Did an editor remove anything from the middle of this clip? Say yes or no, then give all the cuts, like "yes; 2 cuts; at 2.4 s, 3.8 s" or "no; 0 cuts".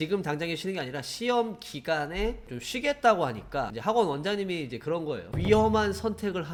no; 0 cuts